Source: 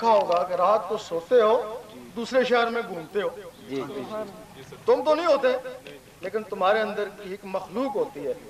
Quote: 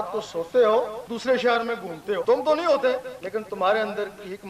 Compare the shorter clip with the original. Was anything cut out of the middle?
yes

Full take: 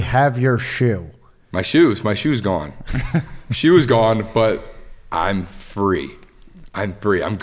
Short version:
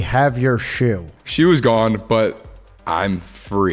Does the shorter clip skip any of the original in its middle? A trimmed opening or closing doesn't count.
yes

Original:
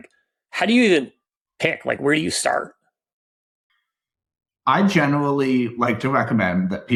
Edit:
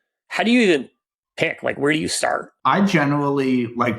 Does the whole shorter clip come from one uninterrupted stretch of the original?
no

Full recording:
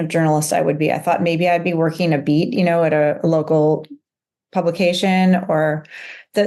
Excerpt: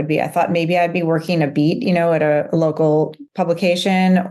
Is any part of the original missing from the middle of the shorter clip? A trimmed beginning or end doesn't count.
yes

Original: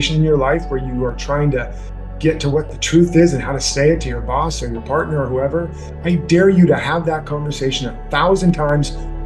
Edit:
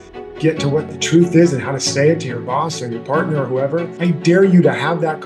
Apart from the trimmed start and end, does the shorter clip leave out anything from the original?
yes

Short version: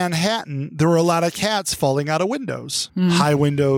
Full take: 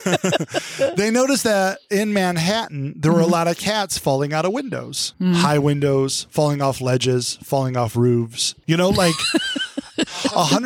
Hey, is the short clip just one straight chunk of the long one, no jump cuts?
yes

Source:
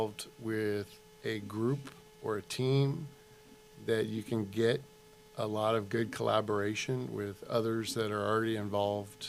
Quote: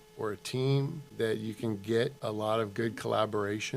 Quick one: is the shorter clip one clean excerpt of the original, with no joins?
no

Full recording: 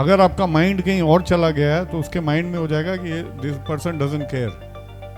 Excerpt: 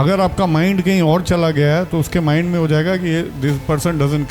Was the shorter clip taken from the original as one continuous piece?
yes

